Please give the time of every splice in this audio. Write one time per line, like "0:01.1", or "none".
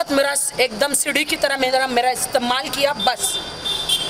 none